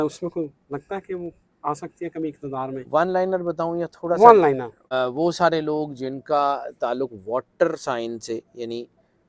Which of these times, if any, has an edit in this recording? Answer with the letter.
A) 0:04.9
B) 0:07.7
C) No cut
A